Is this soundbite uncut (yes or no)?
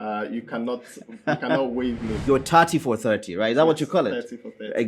no